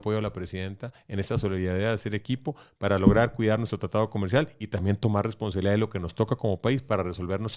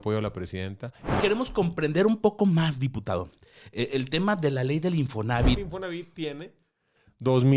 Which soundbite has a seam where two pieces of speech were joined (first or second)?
second